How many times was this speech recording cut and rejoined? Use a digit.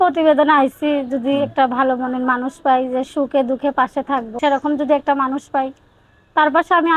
1